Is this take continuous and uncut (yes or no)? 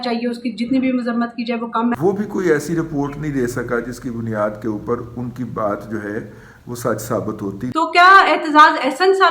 no